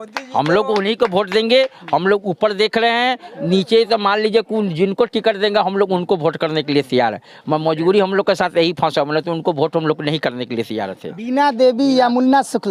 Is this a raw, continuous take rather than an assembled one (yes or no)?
yes